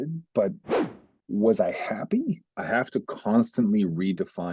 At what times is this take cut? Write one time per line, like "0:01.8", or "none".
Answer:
0:02.5